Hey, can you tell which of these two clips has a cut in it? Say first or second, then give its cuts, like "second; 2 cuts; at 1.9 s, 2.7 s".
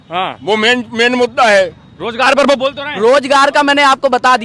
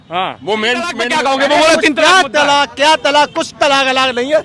second; 1 cut; at 1.0 s